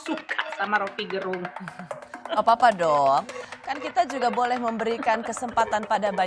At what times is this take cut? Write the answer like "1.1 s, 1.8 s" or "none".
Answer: 3.5 s